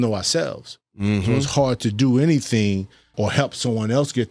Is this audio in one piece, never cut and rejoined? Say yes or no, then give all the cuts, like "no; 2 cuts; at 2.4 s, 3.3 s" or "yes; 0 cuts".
no; 1 cut; at 3.1 s